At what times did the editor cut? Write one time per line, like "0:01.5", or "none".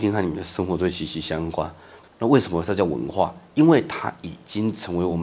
0:01.9